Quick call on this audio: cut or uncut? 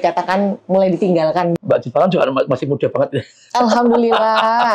cut